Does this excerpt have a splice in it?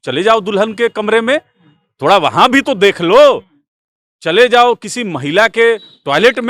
no; 0 cuts

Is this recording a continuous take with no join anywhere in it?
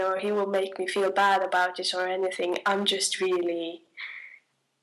yes; 0 cuts

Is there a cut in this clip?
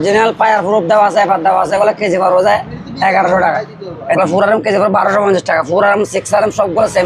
yes; 1 cut; at 4.2 s

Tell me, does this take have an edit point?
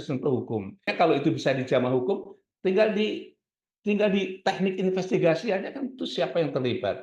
yes; 1 cut; at 0.9 s

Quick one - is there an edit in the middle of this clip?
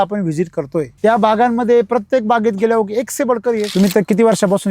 yes; 2 cuts; at 0.9 s, 3.7 s

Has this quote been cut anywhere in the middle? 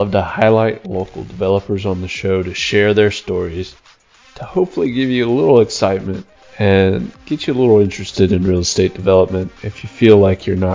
no; 0 cuts

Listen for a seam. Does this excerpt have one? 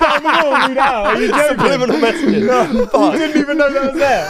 no; 0 cuts

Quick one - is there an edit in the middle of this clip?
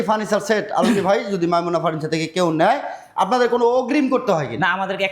no; 0 cuts

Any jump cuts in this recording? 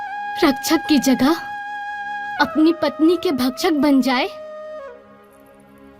no; 0 cuts

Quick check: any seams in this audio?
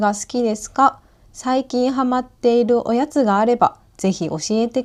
no; 0 cuts

